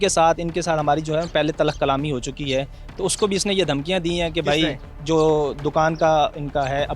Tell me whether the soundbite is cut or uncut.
uncut